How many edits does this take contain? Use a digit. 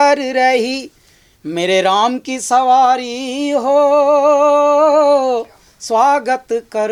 0